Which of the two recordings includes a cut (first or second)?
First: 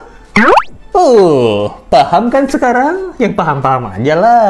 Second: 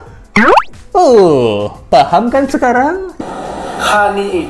second